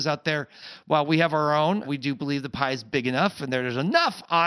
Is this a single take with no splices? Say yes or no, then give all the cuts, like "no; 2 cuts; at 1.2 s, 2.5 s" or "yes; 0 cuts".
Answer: yes; 0 cuts